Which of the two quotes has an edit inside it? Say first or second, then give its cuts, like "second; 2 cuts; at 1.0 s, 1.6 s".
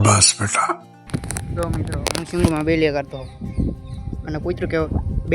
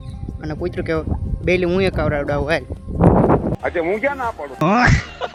first; 1 cut; at 0.9 s